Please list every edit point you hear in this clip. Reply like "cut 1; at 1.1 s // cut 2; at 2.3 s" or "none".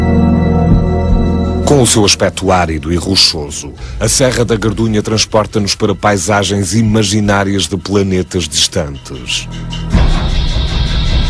cut 1; at 1.5 s